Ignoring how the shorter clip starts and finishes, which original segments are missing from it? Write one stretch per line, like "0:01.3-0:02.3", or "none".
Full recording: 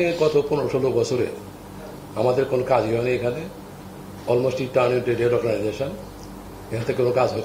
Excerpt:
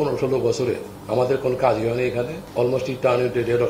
0:01.4-0:02.0
0:03.5-0:04.1